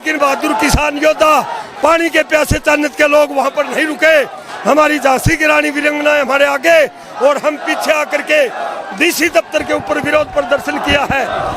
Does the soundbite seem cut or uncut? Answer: uncut